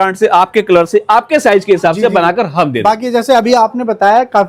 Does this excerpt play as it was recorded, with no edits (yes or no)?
yes